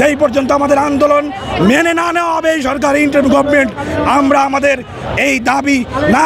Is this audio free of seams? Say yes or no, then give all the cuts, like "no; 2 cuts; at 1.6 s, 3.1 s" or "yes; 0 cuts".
yes; 0 cuts